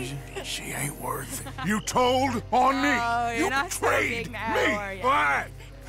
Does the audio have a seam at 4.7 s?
no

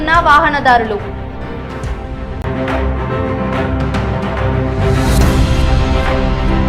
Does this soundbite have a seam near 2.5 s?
yes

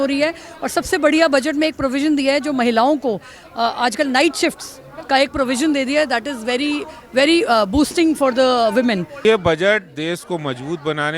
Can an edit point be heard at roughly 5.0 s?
no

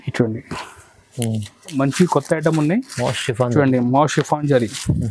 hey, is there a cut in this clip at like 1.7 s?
yes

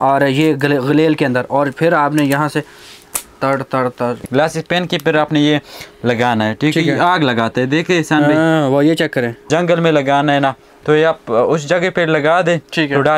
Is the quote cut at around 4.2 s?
yes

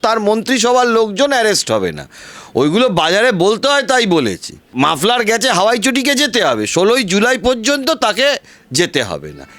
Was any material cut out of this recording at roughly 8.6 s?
no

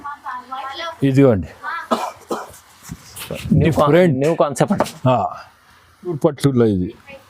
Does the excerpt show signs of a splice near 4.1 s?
no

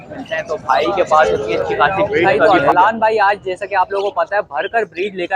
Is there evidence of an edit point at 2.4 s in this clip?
yes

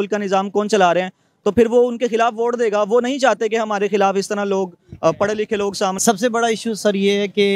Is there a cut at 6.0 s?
yes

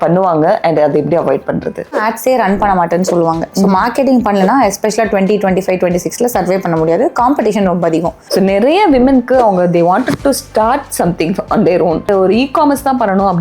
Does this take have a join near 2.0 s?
yes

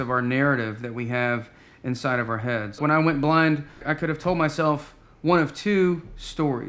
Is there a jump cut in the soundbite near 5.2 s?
no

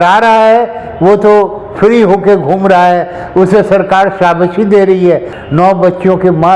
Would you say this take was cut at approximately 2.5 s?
no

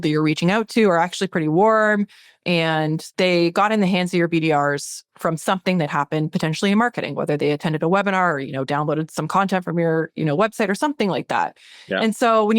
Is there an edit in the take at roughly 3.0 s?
yes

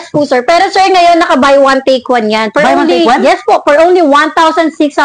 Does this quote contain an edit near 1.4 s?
no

